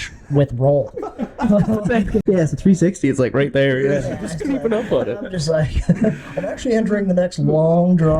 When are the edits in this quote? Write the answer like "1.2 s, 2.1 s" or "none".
2.2 s

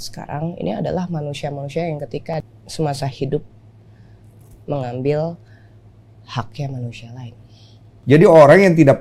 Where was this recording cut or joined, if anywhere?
2.3 s, 7.9 s

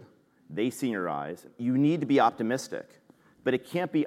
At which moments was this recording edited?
1.5 s

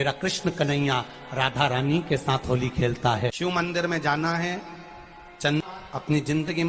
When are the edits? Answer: 3.3 s, 5.6 s

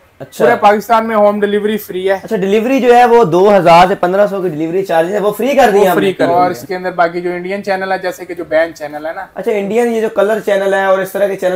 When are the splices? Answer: 6.2 s

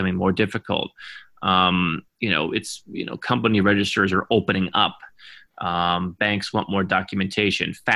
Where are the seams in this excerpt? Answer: none

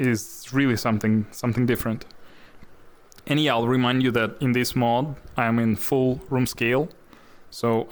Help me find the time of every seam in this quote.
none

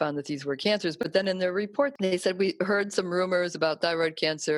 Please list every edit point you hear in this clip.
none

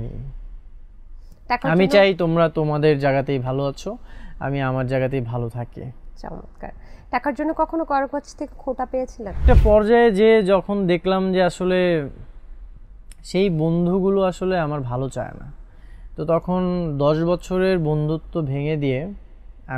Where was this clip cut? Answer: 9.4 s

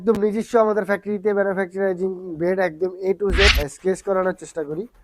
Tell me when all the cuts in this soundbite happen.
3.5 s

